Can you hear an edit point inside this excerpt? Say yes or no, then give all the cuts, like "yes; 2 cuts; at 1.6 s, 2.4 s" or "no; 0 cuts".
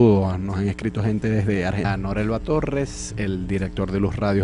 no; 0 cuts